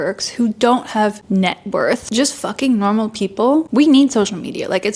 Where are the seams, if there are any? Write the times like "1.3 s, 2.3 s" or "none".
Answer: 1.2 s, 2.1 s, 3.7 s